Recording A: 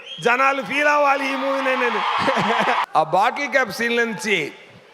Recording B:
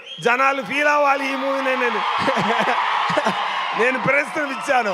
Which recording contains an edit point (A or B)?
A